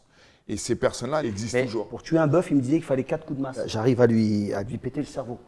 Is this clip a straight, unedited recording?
no; 2 cuts; at 1.4 s, 3.7 s

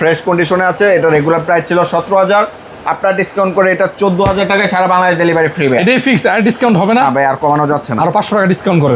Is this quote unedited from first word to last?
yes; 0 cuts

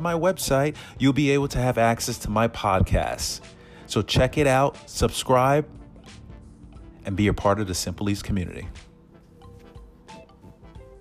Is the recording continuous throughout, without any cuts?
yes; 0 cuts

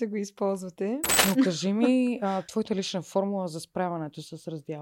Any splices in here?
yes; 2 cuts; at 1.1 s, 2.5 s

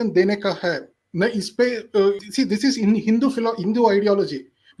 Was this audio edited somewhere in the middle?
yes; 1 cut; at 2.3 s

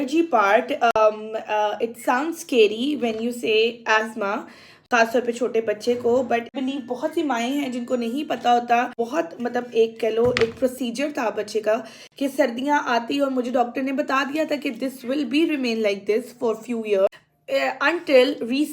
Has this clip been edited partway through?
yes; 3 cuts; at 6.5 s, 9.0 s, 17.1 s

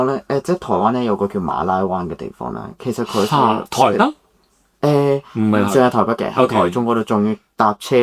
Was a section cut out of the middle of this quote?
no; 0 cuts

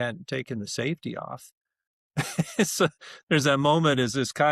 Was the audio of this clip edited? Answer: no; 0 cuts

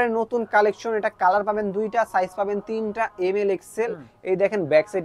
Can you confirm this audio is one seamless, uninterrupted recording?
yes; 0 cuts

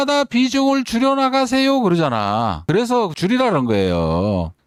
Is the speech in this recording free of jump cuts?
yes; 0 cuts

